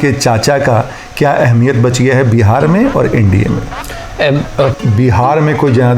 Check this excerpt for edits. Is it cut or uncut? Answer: cut